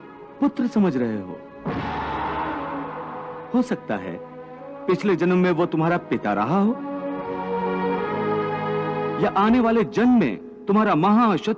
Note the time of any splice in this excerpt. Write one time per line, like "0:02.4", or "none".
none